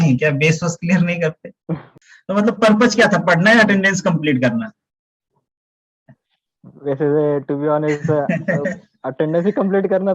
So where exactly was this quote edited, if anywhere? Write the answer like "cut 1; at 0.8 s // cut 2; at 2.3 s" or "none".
cut 1; at 1.9 s